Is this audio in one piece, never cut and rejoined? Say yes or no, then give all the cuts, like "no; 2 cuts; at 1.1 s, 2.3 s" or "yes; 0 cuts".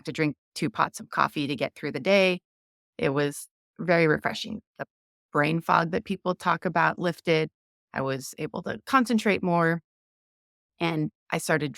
yes; 0 cuts